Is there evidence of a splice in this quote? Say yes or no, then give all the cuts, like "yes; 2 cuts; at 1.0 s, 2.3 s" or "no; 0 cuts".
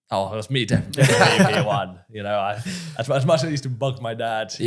no; 0 cuts